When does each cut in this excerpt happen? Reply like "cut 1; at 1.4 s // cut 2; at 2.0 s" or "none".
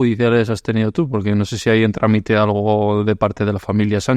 none